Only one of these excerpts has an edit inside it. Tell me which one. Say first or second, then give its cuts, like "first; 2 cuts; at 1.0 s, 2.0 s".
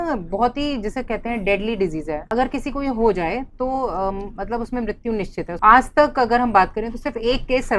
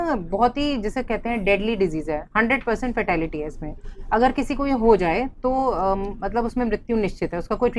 first; 2 cuts; at 2.3 s, 5.5 s